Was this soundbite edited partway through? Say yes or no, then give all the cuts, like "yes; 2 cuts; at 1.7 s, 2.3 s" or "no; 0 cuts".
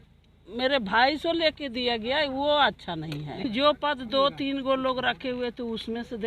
yes; 1 cut; at 3.5 s